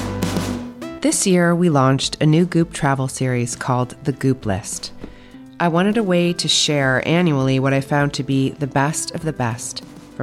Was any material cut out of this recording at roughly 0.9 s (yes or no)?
yes